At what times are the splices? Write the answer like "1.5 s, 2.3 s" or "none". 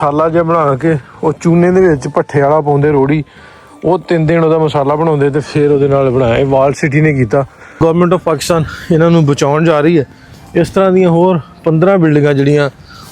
7.8 s